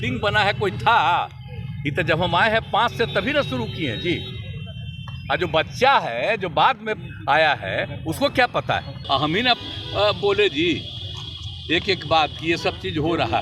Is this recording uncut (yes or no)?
no